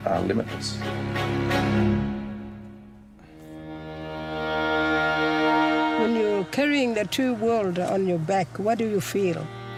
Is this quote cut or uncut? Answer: uncut